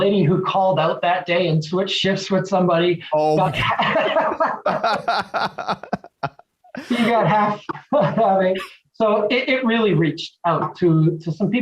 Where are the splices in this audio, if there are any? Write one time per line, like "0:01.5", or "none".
none